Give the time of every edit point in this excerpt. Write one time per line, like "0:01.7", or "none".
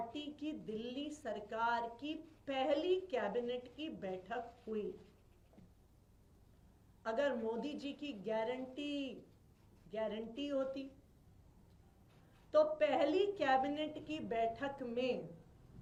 none

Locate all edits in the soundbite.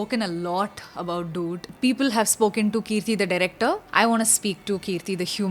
0:01.7
0:03.8

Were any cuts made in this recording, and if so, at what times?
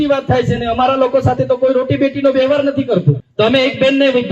0:03.2

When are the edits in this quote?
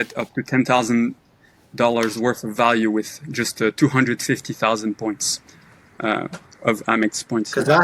none

